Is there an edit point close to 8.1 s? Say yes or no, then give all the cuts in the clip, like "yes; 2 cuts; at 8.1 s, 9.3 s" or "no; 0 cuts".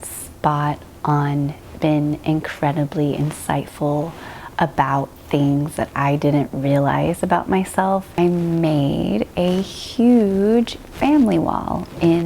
yes; 1 cut; at 8.1 s